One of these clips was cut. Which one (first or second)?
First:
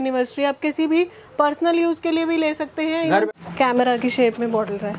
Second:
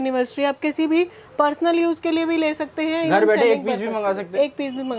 first